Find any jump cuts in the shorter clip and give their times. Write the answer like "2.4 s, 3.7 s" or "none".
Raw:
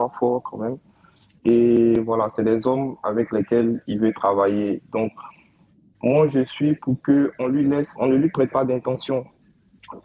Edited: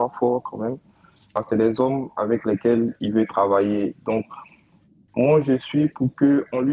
1.4 s